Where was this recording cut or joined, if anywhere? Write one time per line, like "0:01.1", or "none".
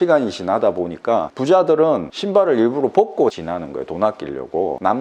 0:03.4